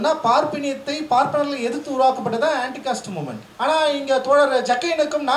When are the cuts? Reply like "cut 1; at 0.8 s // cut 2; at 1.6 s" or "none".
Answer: cut 1; at 3.4 s